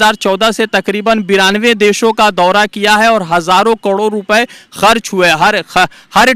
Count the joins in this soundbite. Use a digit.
0